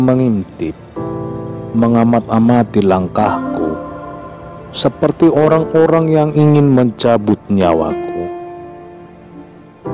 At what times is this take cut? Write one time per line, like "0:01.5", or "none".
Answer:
0:07.9